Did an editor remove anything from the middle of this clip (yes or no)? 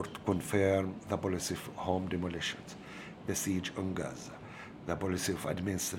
no